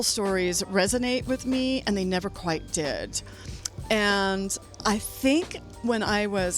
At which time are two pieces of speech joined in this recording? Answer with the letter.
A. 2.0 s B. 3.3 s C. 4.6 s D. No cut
C